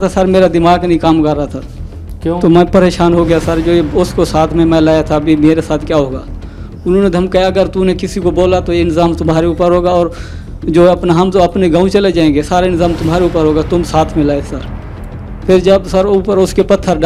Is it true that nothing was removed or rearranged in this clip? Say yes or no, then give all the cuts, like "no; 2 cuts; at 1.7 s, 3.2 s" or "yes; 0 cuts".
yes; 0 cuts